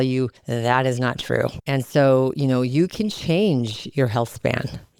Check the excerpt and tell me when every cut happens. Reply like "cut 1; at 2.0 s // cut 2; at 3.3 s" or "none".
none